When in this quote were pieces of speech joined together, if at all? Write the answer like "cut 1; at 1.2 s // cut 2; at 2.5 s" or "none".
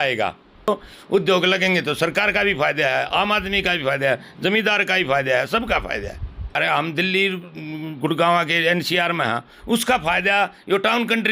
cut 1; at 0.7 s // cut 2; at 6.6 s